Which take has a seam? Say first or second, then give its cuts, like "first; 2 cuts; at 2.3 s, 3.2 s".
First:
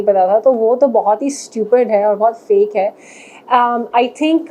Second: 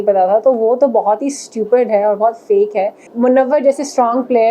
second; 1 cut; at 3.1 s